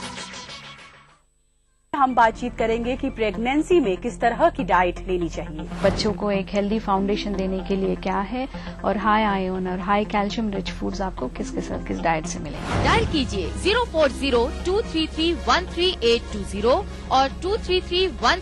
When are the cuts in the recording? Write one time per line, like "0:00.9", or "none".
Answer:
0:01.3